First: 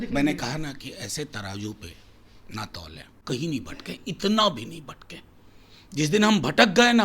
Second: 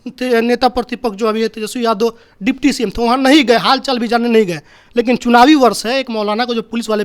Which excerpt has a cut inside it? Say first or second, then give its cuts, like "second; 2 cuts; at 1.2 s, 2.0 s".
first; 1 cut; at 3.2 s